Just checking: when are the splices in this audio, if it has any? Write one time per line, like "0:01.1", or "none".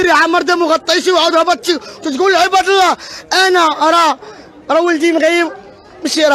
none